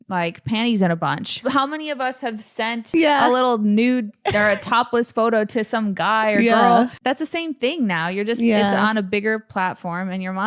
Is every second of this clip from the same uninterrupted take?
no; 3 cuts; at 1.4 s, 2.9 s, 7.0 s

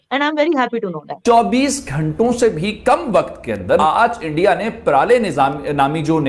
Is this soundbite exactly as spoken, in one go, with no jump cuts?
no; 2 cuts; at 1.2 s, 3.8 s

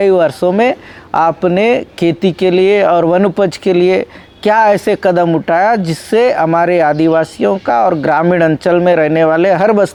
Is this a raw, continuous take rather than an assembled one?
yes; 0 cuts

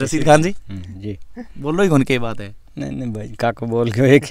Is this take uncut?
yes; 0 cuts

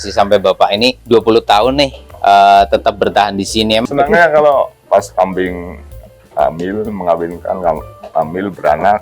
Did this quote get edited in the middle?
yes; 1 cut; at 3.8 s

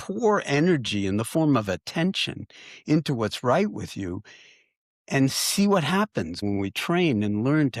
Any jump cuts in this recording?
yes; 1 cut; at 6.4 s

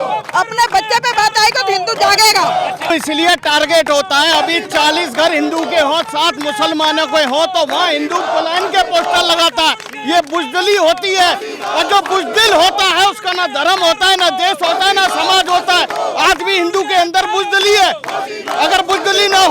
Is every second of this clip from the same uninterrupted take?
no; 1 cut; at 2.9 s

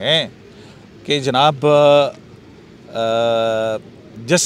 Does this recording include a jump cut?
no; 0 cuts

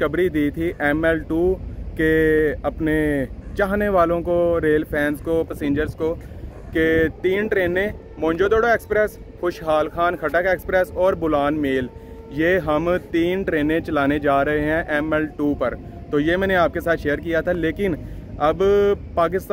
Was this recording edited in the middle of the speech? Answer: no; 0 cuts

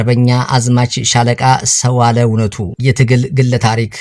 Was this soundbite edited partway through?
yes; 1 cut; at 2.7 s

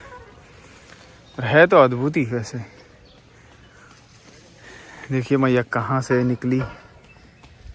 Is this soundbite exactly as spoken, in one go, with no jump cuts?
yes; 0 cuts

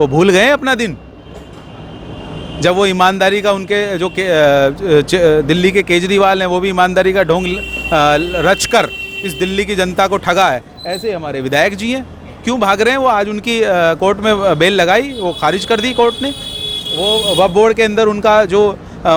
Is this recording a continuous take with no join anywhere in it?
yes; 0 cuts

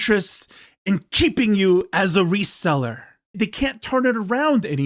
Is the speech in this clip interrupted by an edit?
yes; 1 cut; at 3.3 s

